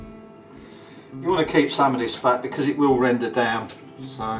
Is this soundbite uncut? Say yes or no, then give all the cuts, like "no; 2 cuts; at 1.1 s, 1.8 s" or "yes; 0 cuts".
no; 1 cut; at 1.2 s